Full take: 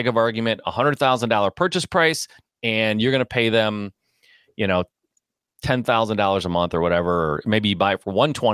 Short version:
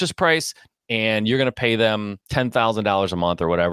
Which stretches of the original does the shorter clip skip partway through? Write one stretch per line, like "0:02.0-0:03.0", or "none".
0:03.9-0:05.5

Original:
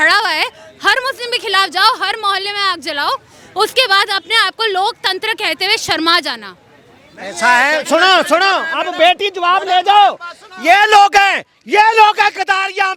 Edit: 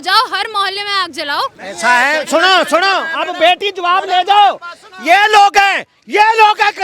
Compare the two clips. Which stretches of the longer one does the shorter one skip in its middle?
0:03.3-0:07.2

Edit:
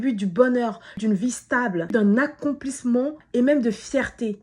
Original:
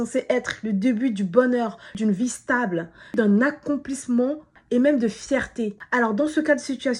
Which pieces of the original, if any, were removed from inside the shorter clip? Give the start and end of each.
0:02.8-0:03.1
0:04.4-0:04.6

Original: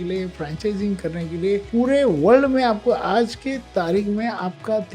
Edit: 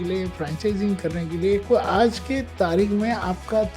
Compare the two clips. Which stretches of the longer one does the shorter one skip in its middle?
0:01.6-0:02.8

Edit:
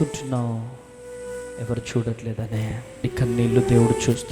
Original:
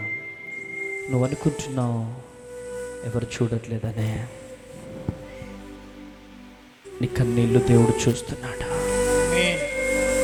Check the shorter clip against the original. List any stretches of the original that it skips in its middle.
0:04.5-0:07.0

